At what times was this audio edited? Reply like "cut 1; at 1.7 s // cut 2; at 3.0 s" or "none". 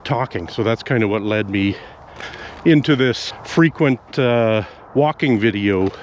cut 1; at 3.3 s // cut 2; at 4.8 s